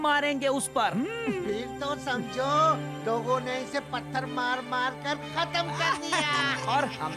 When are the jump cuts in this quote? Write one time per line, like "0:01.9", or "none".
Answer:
none